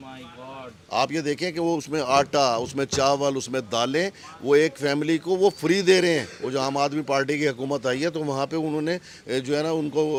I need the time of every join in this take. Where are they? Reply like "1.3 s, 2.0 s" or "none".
none